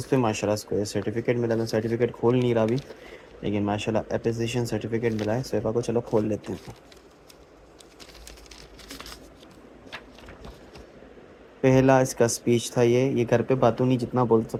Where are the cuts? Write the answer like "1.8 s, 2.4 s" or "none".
none